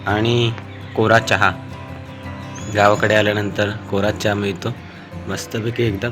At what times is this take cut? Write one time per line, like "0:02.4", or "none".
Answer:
none